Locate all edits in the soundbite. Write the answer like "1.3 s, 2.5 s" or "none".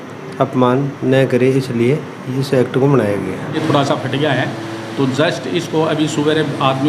3.6 s